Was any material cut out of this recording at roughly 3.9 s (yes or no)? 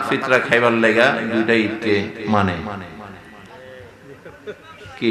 no